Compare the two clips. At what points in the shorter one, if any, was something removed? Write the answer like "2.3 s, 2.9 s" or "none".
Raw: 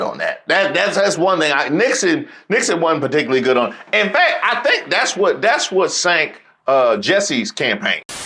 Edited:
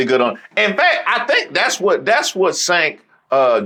none